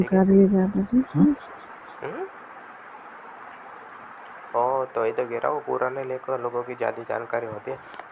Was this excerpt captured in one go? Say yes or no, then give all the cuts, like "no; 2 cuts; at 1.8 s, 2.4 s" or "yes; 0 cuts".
no; 1 cut; at 1.5 s